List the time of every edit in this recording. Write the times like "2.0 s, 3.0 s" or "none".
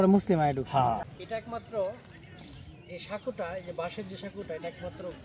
1.0 s